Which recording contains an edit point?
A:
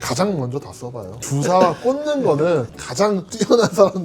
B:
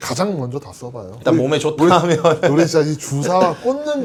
A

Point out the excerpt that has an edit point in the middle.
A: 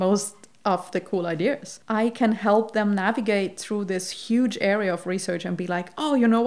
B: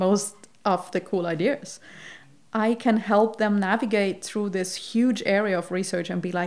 A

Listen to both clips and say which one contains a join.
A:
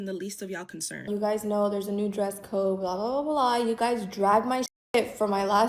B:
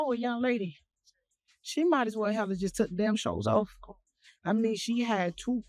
A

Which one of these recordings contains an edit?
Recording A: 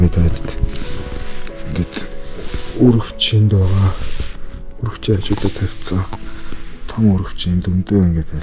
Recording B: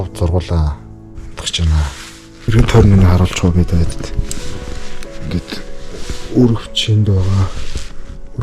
B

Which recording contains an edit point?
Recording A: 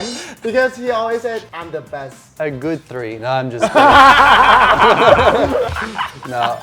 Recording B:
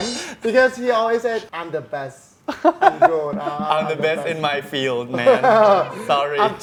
A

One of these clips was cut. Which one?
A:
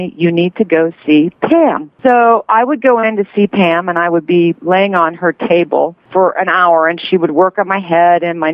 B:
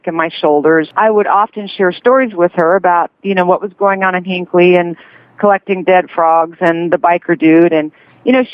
A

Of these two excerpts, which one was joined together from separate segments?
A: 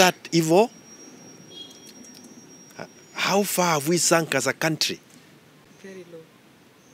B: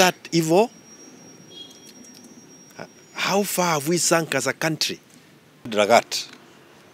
B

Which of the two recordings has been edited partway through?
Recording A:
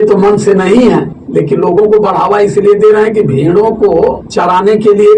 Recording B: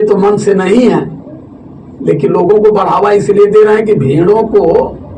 A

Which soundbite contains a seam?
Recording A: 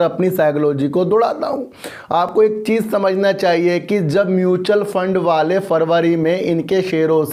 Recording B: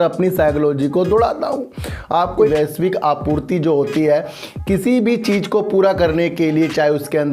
B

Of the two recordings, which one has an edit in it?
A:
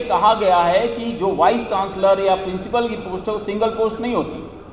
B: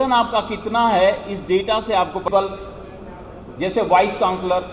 B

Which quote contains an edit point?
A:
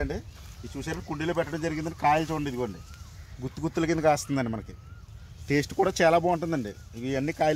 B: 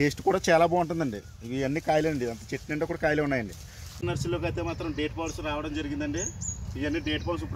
B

